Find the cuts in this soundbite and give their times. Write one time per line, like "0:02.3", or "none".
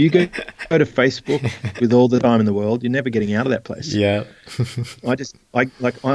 none